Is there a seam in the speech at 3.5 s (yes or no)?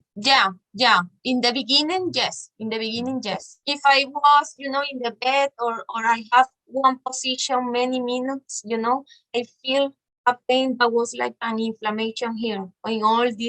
yes